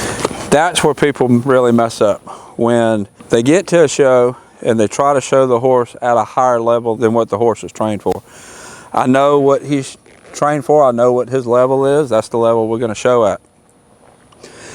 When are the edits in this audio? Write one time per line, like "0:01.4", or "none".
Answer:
0:03.1